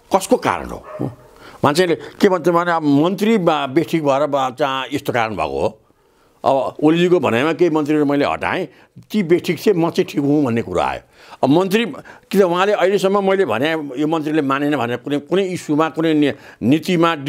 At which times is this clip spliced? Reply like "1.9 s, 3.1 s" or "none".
none